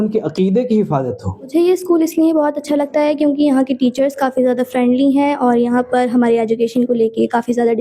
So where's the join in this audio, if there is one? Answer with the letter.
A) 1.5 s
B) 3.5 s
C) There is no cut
A